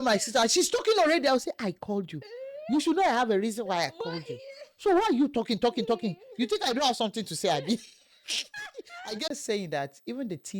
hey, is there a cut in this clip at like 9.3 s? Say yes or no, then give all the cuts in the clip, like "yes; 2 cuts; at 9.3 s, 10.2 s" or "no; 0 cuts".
yes; 1 cut; at 9.3 s